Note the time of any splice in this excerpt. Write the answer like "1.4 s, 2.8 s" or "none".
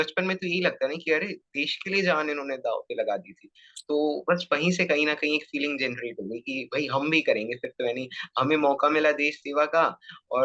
none